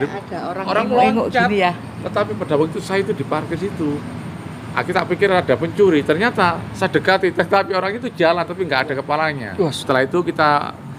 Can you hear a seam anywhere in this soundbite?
yes; 1 cut; at 9.8 s

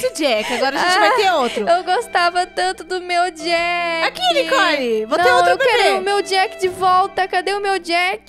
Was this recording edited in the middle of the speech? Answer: no; 0 cuts

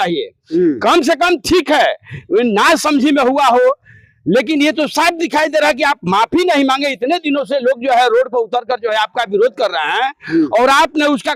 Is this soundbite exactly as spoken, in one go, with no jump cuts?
yes; 0 cuts

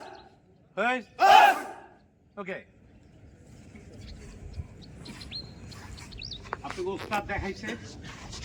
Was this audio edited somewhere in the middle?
no; 0 cuts

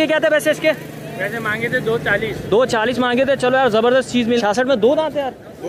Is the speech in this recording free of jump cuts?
no; 1 cut; at 4.4 s

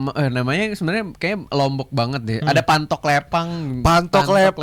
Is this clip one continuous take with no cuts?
yes; 0 cuts

